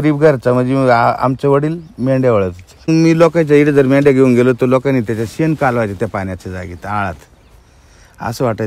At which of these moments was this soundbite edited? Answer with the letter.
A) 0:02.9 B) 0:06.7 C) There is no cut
A